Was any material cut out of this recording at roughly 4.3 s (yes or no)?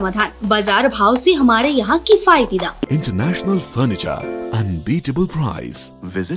no